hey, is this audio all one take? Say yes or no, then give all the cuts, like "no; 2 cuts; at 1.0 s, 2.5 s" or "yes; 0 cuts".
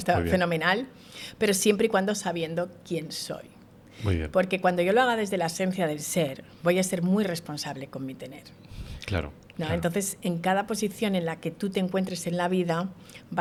yes; 0 cuts